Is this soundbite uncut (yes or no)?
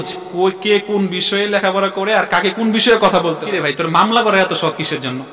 no